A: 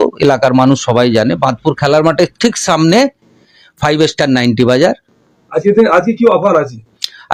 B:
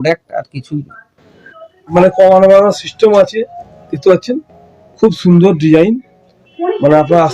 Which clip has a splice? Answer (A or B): B